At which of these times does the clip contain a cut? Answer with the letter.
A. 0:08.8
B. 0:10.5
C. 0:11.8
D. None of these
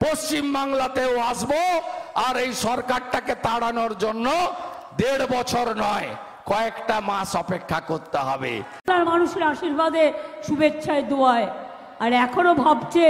A